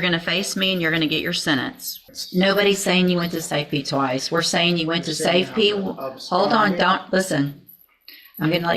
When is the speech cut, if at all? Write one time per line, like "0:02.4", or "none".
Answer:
0:02.1